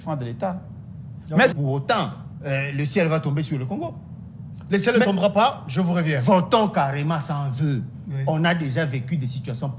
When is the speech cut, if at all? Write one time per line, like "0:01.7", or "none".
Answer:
0:01.5